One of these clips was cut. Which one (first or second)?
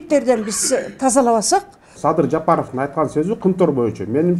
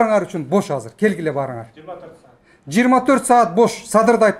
first